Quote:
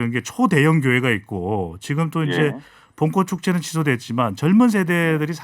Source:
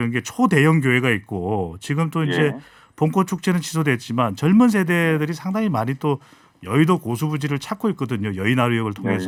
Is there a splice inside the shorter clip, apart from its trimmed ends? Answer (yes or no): no